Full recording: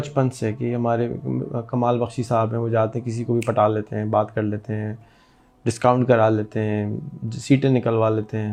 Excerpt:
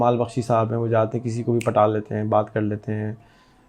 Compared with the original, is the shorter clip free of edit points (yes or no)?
yes